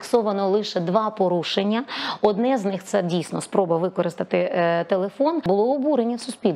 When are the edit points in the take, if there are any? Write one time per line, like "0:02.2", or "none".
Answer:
0:05.5